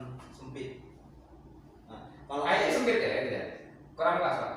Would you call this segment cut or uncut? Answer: uncut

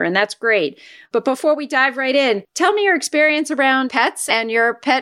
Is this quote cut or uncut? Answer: cut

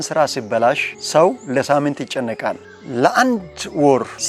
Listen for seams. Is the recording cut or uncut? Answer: uncut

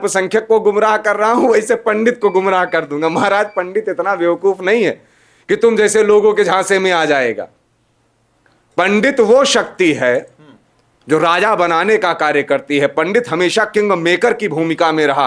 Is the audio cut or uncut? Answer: uncut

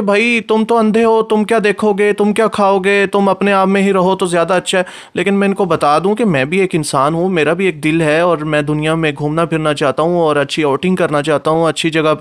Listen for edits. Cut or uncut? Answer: uncut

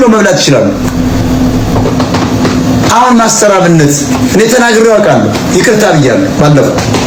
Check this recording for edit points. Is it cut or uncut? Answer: uncut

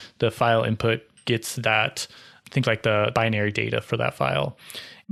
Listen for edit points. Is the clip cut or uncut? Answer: uncut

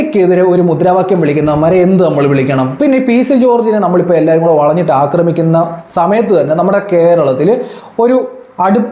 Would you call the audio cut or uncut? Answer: cut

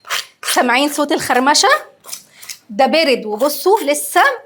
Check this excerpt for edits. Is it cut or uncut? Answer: uncut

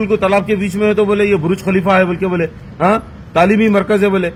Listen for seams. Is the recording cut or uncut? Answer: uncut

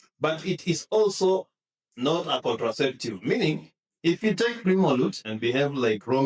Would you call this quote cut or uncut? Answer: cut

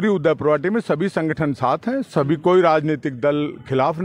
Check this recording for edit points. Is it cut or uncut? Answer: uncut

